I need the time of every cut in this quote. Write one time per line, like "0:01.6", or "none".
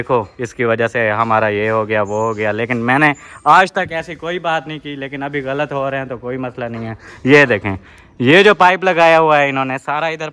none